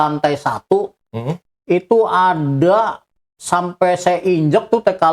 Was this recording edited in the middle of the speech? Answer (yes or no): no